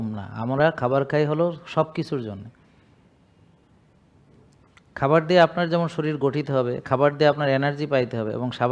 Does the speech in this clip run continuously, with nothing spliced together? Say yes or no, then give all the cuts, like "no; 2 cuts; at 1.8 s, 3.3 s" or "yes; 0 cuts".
yes; 0 cuts